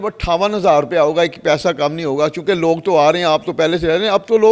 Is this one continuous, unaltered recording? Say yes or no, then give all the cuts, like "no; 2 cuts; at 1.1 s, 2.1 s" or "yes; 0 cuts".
yes; 0 cuts